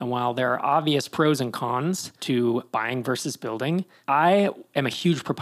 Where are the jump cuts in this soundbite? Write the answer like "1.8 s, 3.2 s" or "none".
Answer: 2.1 s, 2.7 s